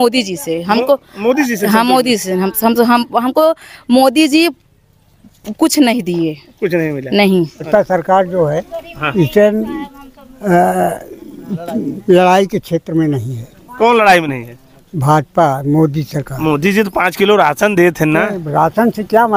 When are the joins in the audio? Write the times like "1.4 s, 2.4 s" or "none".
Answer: 7.7 s